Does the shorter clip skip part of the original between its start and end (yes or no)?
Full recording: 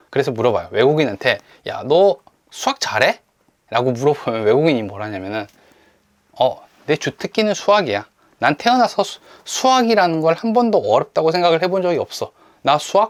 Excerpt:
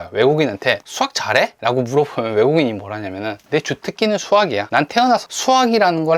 yes